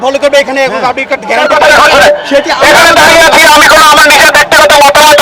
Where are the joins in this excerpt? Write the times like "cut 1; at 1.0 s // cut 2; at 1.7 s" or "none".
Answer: cut 1; at 1.4 s